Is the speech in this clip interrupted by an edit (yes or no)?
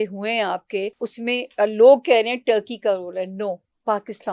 yes